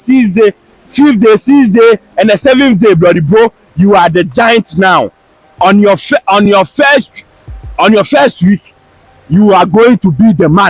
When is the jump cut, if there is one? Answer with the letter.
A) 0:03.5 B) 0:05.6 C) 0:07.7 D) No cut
B